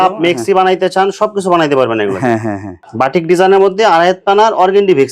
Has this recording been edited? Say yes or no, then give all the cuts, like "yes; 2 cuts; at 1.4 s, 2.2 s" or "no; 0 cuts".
yes; 1 cut; at 2.8 s